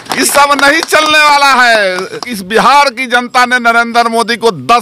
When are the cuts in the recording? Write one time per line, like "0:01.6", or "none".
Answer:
0:02.3